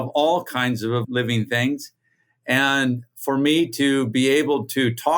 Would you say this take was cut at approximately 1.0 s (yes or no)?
yes